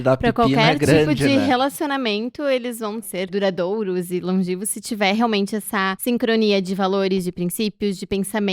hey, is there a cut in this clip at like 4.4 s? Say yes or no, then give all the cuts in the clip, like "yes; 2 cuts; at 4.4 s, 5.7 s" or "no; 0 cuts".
no; 2 cuts; at 3.1 s, 5.9 s